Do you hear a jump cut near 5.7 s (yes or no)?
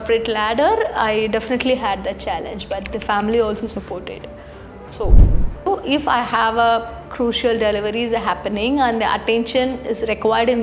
yes